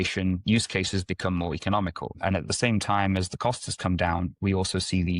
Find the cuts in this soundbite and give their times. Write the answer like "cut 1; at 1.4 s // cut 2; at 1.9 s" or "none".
cut 1; at 2.1 s